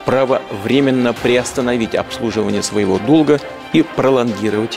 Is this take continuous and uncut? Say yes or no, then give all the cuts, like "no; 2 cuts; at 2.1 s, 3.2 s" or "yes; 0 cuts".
yes; 0 cuts